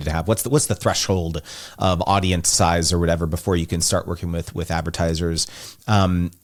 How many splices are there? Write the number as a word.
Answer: zero